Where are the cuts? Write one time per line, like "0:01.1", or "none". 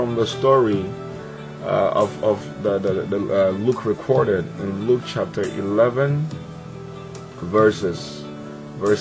0:03.0